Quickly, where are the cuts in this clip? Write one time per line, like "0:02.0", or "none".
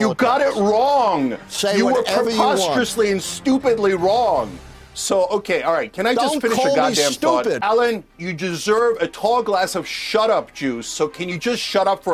0:07.6